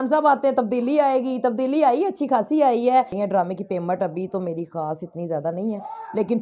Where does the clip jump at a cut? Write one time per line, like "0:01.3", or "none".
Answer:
0:03.1

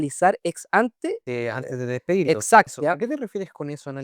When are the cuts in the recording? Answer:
0:01.2
0:02.7

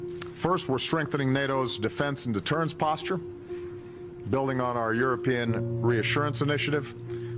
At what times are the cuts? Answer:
0:03.4

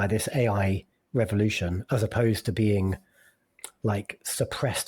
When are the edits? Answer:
0:03.5

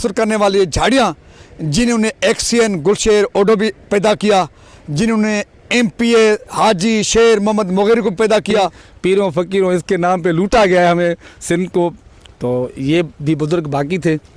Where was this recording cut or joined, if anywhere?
0:08.9

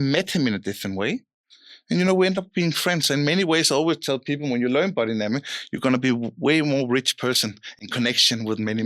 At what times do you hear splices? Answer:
none

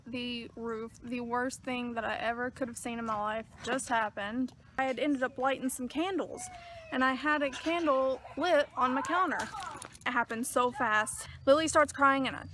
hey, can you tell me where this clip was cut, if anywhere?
0:04.8
0:10.1
0:11.2

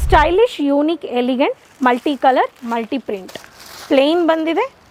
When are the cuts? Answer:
none

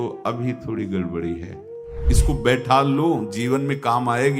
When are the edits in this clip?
0:02.1

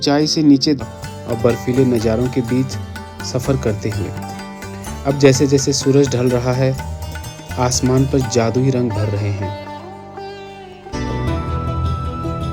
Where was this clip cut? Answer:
0:00.8
0:10.9

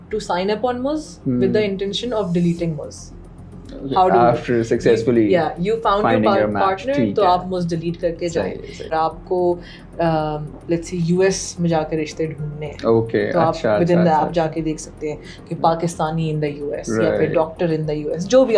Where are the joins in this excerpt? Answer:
0:08.9

